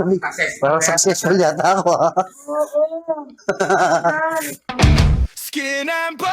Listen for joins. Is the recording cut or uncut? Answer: cut